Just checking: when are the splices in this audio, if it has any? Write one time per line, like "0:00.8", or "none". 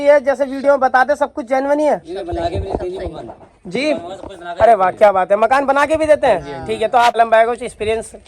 0:07.2